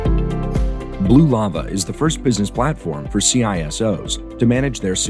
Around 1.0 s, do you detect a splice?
yes; 1 cut; at 1.0 s

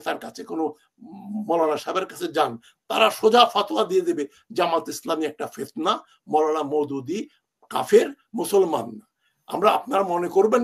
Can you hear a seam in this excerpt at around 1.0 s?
no; 0 cuts

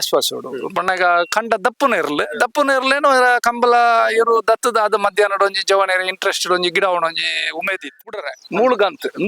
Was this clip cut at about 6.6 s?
no; 1 cut; at 8.3 s

